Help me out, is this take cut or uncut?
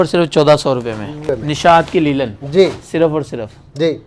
cut